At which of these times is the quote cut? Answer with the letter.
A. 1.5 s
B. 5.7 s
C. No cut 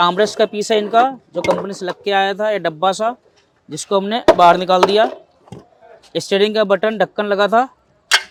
C